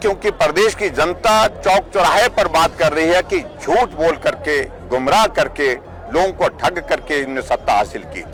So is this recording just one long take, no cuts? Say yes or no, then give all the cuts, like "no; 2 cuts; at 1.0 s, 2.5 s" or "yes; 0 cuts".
yes; 0 cuts